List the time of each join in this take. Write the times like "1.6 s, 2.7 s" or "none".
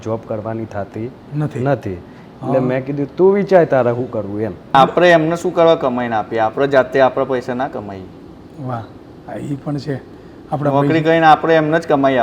4.8 s